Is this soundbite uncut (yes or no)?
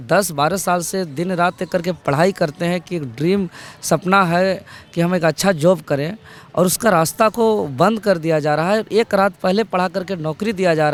yes